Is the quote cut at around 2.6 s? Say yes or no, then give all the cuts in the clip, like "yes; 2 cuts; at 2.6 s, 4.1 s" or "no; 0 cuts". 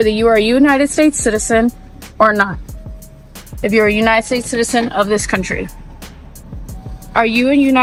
no; 0 cuts